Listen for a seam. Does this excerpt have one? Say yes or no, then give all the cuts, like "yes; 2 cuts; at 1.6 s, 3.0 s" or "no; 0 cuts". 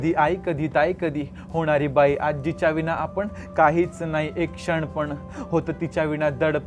no; 0 cuts